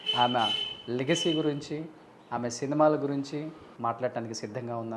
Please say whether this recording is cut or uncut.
cut